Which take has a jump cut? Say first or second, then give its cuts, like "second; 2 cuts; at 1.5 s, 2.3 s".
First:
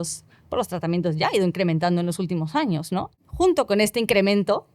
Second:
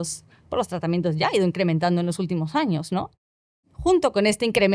first; 1 cut; at 3.2 s